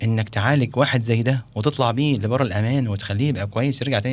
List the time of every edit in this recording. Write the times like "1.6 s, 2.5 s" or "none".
none